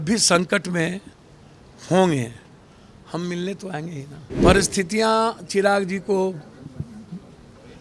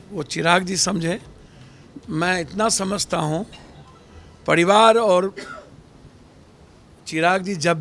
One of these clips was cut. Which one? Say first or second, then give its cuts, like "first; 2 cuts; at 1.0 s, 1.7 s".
first; 1 cut; at 4.3 s